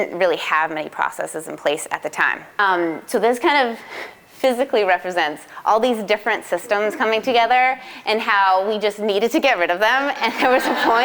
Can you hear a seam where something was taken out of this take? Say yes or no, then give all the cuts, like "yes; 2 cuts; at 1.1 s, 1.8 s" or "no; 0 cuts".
yes; 1 cut; at 2.6 s